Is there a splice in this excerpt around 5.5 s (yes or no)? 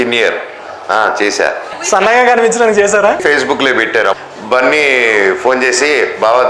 no